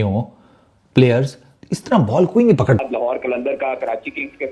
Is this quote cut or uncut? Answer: cut